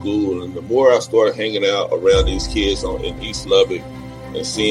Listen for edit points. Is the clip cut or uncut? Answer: uncut